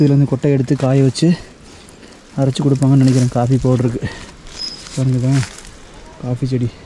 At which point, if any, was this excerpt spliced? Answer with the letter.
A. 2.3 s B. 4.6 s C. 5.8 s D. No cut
D